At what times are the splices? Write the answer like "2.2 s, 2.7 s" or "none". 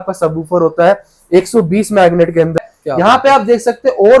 2.6 s

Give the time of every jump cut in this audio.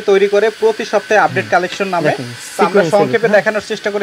none

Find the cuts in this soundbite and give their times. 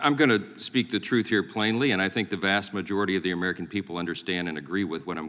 1.3 s

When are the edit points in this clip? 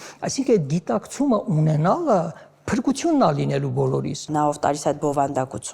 4.3 s

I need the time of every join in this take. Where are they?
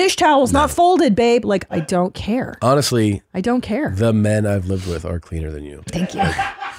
1.7 s

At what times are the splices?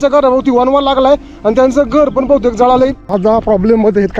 3.1 s

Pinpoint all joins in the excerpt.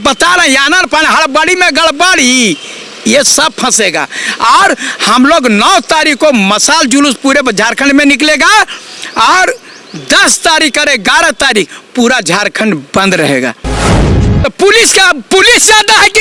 14.0 s

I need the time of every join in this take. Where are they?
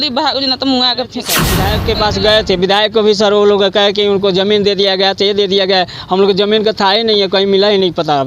1.5 s

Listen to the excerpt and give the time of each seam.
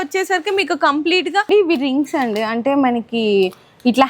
1.5 s

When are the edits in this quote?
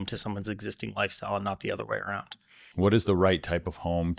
2.7 s

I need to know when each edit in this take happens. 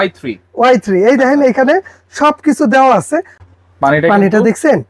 3.3 s

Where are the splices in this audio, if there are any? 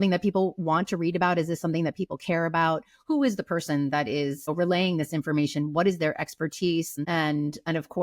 6.9 s

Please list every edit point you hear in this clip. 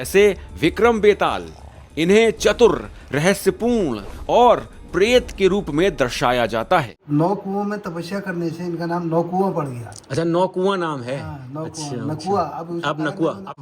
7.0 s

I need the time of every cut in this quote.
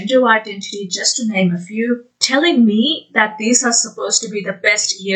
none

